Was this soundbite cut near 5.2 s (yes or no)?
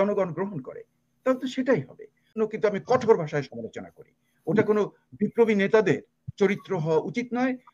no